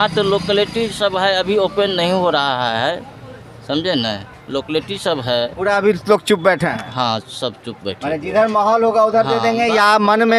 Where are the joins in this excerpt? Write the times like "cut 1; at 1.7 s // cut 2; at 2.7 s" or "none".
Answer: none